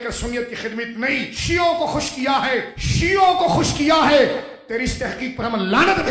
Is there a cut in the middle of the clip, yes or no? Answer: yes